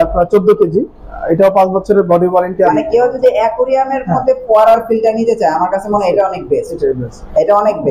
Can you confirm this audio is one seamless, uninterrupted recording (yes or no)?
no